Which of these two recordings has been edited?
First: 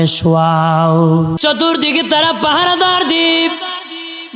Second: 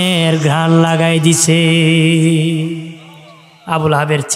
first; 1 cut; at 1.4 s

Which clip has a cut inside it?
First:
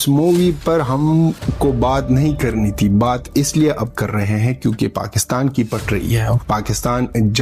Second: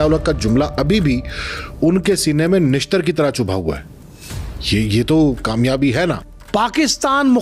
second; 1 cut; at 6.2 s

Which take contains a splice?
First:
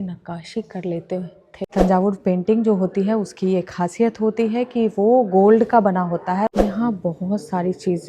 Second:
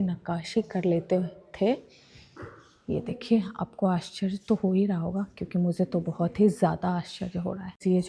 first; 2 cuts; at 1.5 s, 6.5 s

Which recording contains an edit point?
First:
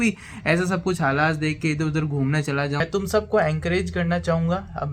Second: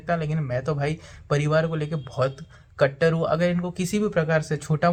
first; 1 cut; at 2.8 s

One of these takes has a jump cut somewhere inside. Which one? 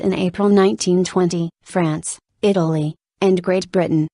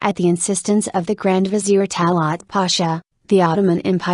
first; 1 cut; at 2.1 s

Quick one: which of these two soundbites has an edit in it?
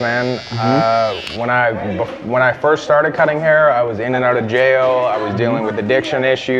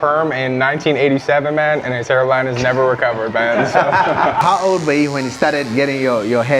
second; 1 cut; at 4.4 s

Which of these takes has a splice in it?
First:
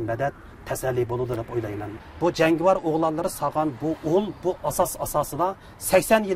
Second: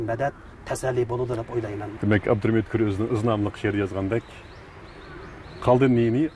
first; 1 cut; at 1.9 s

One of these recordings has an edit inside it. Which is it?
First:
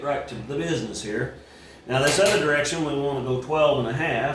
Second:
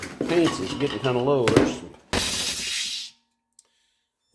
second; 1 cut; at 2.1 s

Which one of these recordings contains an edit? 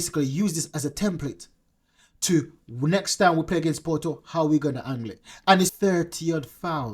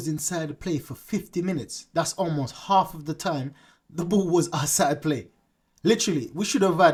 first; 1 cut; at 5.7 s

